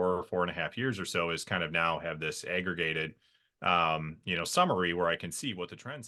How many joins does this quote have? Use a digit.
0